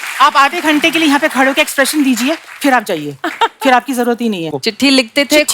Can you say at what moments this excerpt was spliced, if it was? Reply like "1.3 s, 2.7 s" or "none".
4.5 s